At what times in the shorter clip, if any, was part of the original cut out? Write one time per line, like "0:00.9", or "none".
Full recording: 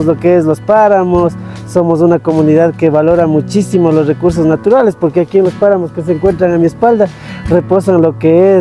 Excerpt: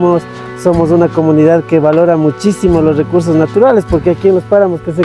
none